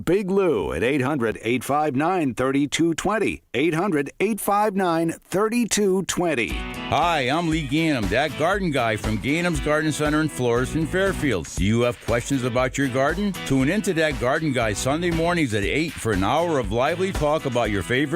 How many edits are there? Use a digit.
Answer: 1